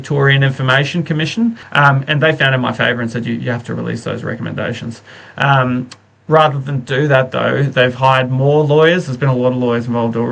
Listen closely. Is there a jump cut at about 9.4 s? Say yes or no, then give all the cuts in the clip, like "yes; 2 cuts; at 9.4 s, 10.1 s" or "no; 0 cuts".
no; 1 cut; at 1.6 s